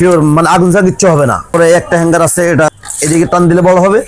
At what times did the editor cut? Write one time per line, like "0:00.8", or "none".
0:01.4
0:02.7